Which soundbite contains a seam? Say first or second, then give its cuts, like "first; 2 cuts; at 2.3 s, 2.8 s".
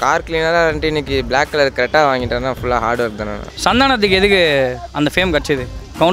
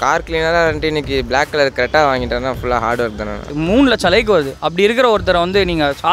second; 1 cut; at 3.5 s